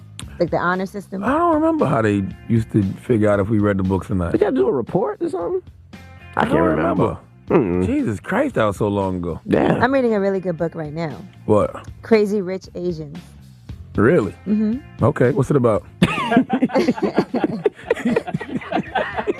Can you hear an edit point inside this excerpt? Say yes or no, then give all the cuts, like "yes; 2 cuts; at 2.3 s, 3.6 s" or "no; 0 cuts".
yes; 1 cut; at 3.0 s